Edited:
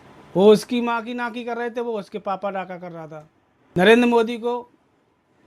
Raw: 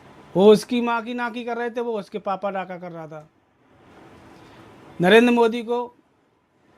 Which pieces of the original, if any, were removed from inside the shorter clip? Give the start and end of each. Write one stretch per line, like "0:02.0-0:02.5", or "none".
0:03.8-0:05.0